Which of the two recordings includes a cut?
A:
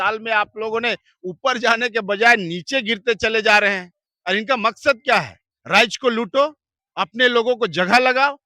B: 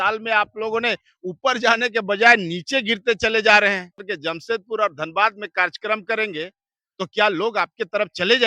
B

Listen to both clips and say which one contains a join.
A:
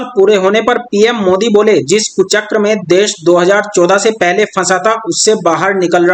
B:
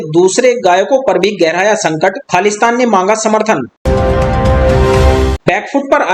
B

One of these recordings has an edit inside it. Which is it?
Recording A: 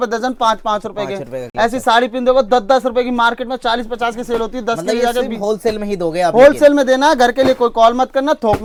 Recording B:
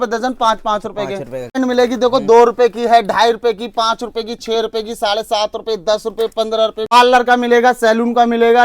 B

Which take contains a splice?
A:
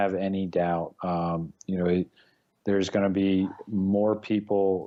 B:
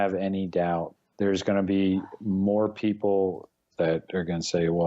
B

